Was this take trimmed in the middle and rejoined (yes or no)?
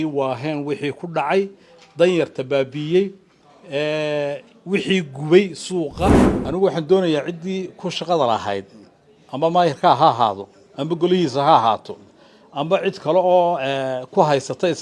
yes